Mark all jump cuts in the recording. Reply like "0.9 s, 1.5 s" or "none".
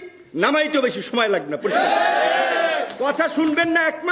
none